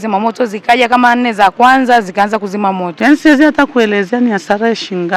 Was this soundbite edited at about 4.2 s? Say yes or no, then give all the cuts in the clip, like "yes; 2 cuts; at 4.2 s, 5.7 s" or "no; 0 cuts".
no; 1 cut; at 2.9 s